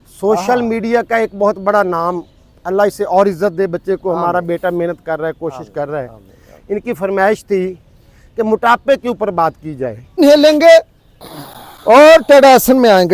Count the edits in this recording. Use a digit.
1